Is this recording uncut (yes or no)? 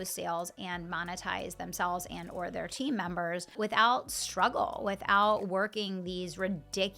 no